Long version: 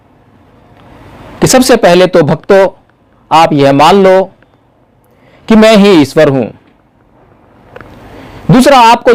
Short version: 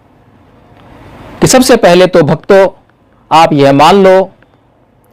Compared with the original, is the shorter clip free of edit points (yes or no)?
yes